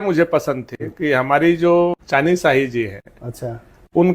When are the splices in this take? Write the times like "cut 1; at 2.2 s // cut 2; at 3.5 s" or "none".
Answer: cut 1; at 2.0 s